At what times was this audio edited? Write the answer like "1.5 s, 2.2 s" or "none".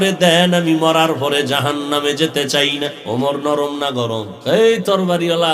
3.0 s, 4.3 s